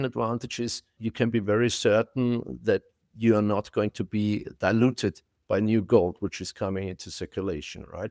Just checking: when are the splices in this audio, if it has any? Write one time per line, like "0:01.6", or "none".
0:01.0